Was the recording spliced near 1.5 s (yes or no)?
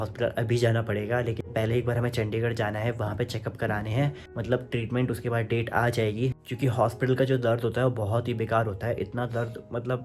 yes